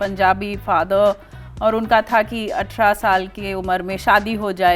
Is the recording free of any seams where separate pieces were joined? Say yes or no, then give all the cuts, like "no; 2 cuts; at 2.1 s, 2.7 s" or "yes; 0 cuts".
yes; 0 cuts